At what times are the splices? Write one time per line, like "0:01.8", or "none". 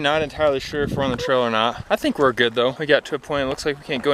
0:02.7